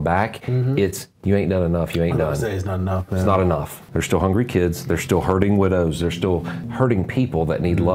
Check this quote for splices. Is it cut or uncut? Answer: cut